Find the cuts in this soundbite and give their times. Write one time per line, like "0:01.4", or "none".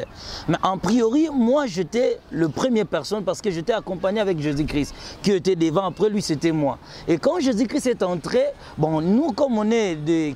none